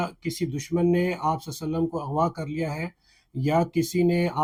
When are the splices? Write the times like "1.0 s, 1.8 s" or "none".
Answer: none